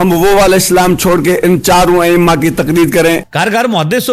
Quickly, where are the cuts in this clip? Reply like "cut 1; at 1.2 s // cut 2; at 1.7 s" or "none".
cut 1; at 3.2 s